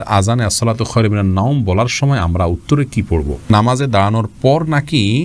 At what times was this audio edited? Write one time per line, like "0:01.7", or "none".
0:03.5